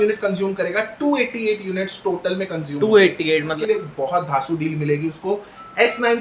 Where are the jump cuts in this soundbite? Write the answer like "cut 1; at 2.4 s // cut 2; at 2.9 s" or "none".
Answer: cut 1; at 3.5 s